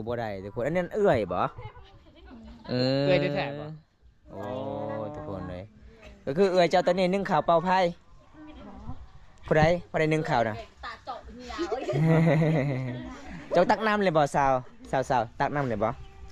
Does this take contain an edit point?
no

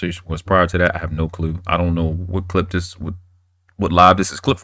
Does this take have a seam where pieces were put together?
no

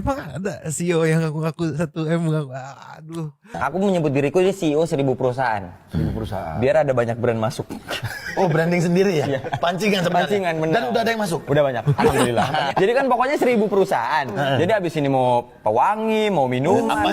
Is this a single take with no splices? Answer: no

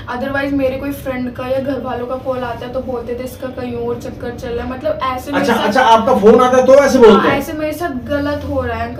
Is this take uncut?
yes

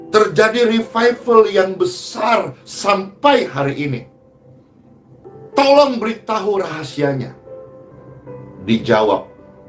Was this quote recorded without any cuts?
yes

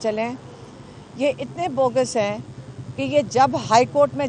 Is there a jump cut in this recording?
no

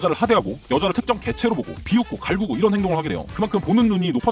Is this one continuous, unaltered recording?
no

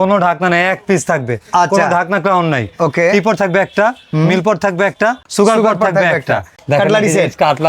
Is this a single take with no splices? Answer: no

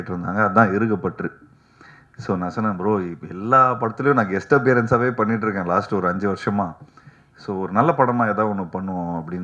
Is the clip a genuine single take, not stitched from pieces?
yes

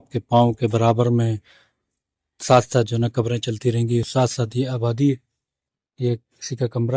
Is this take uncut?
yes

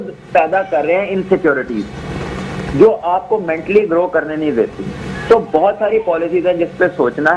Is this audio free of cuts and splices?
yes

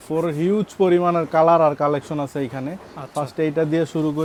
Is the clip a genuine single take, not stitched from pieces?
yes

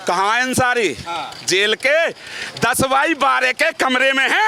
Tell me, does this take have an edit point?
no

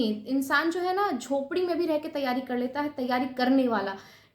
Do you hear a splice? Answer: no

